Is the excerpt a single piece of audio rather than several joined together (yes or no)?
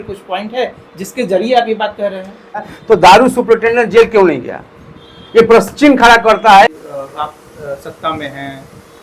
no